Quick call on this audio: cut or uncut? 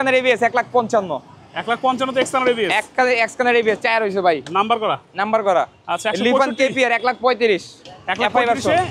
uncut